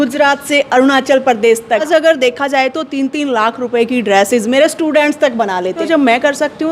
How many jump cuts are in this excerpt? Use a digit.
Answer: 2